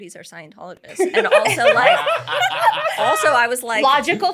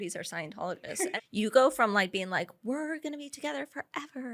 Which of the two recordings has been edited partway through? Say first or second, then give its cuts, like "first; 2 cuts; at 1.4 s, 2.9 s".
second; 1 cut; at 0.9 s